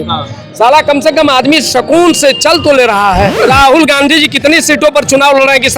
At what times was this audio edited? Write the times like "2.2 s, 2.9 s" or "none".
3.4 s